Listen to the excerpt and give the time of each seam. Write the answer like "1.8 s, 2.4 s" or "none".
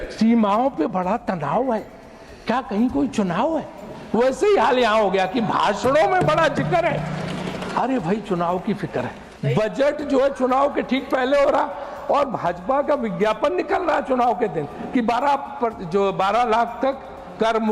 9.2 s